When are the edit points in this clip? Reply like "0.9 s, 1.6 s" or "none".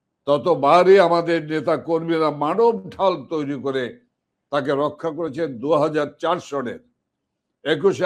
none